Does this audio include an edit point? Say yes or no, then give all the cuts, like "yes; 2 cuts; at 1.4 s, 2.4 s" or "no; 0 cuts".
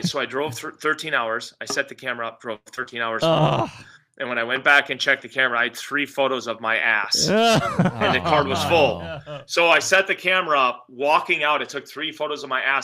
no; 0 cuts